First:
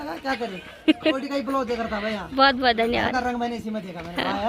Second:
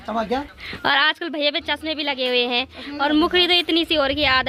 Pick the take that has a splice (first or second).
first